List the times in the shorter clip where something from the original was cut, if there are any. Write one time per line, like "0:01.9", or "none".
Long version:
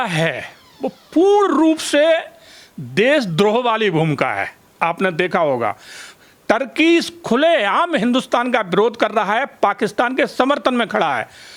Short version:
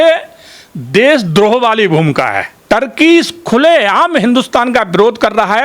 0:02.5